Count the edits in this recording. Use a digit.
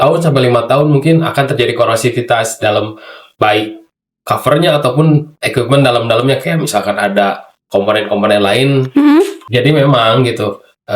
1